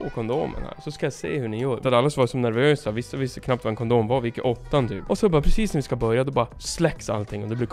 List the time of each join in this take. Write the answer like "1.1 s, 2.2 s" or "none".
1.8 s, 5.0 s, 6.6 s